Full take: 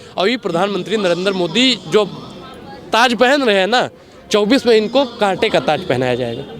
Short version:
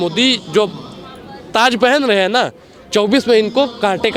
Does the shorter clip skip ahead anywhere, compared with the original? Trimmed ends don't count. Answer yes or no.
no